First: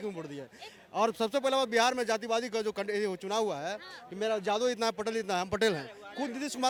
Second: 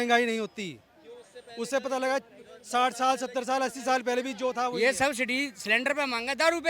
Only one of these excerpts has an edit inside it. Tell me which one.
second; 1 cut; at 4.7 s

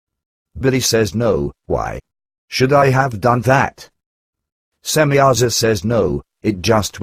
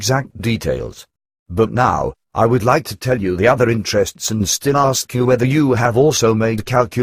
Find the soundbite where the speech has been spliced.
first; 1 cut; at 3.2 s

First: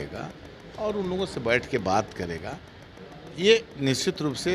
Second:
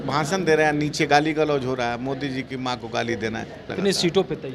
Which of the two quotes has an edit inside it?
second; 1 cut; at 3.6 s

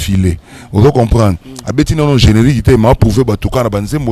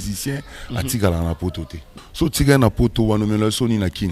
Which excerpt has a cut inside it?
second; 1 cut; at 2.0 s

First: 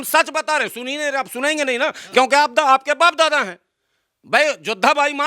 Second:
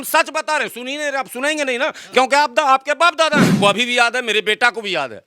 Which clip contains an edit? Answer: second; 1 cut; at 3.5 s

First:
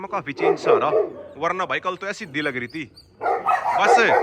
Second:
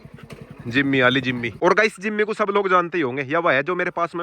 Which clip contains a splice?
second; 1 cut; at 1.5 s

